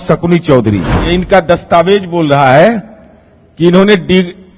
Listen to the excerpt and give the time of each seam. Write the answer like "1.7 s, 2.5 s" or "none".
0.9 s